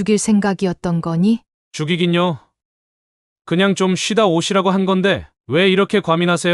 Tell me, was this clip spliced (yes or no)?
yes